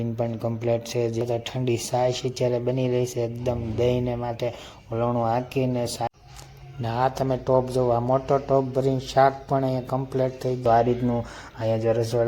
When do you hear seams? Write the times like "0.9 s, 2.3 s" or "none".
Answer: 1.2 s, 6.1 s, 10.6 s

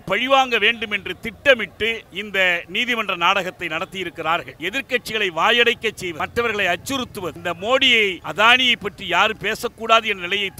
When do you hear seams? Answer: 2.1 s, 4.5 s, 6.1 s, 7.4 s, 8.2 s

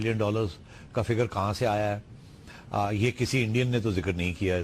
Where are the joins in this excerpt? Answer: 2.6 s

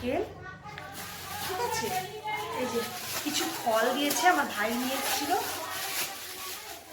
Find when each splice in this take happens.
none

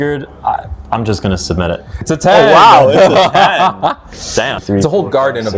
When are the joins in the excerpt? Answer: 2.0 s, 4.6 s

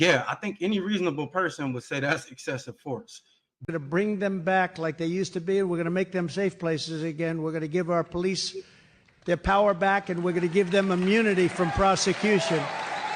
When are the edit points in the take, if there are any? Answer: 3.7 s

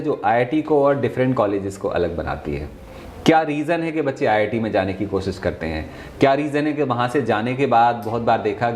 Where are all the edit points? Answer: none

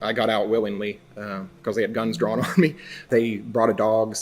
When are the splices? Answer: 3.1 s

